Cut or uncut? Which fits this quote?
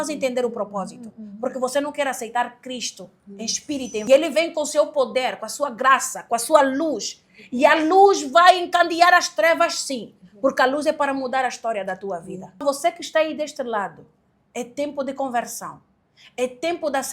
cut